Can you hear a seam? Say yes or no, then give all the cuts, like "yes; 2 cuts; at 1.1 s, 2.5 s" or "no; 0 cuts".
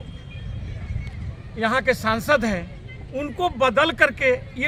no; 0 cuts